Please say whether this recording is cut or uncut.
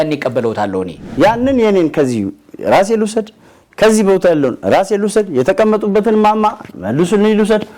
cut